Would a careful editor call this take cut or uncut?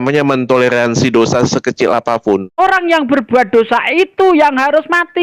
cut